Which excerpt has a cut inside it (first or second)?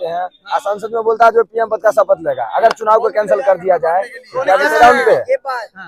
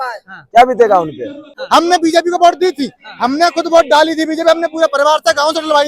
second